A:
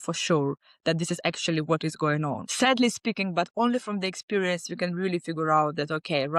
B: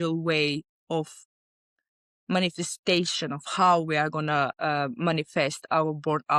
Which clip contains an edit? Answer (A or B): A